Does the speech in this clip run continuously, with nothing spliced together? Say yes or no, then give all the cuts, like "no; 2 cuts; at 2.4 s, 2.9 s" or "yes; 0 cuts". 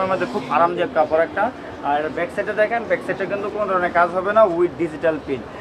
yes; 0 cuts